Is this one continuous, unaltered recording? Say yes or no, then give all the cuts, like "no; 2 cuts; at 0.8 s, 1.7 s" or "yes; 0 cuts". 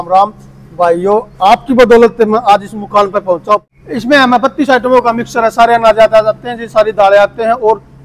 no; 1 cut; at 3.6 s